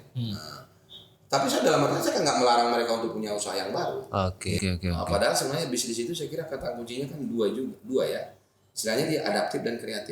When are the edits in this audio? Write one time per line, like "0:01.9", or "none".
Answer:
0:04.6